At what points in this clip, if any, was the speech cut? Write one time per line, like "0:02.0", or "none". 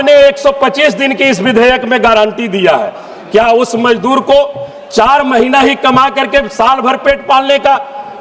none

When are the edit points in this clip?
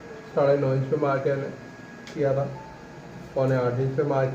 0:02.1

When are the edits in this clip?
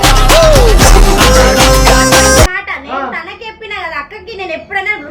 0:02.5

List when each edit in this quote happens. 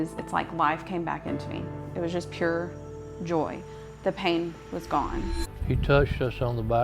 0:05.4

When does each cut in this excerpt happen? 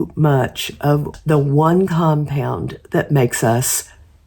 0:01.1

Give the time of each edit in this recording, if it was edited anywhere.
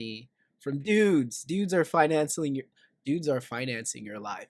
none

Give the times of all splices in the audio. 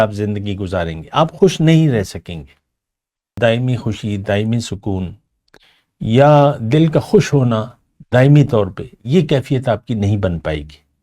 0:03.3

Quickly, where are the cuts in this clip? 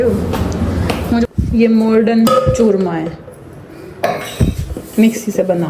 0:01.3

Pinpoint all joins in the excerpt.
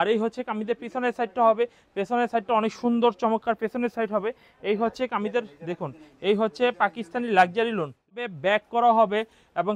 0:08.1

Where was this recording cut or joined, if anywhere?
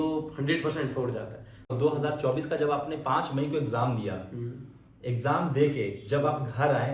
0:01.7

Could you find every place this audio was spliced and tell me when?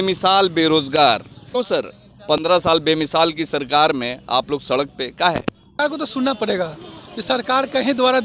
0:01.4
0:05.8

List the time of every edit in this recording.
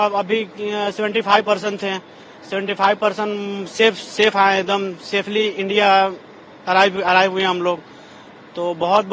none

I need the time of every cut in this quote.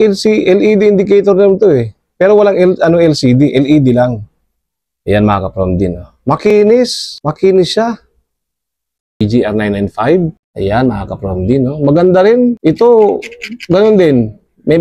0:09.2

